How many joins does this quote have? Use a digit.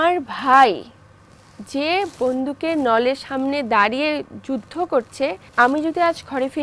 1